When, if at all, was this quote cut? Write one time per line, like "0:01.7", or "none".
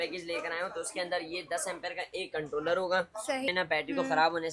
0:03.5